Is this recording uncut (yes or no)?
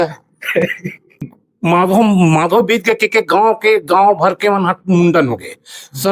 no